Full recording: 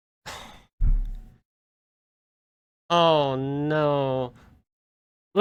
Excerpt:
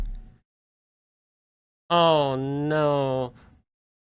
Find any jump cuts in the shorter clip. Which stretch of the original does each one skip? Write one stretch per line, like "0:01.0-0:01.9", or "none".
none